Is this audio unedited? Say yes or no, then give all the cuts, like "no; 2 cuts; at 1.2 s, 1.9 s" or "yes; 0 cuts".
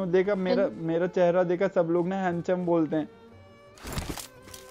yes; 0 cuts